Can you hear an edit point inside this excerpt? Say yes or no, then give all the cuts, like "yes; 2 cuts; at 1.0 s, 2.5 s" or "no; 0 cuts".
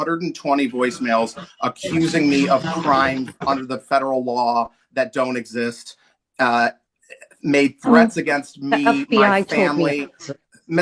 no; 0 cuts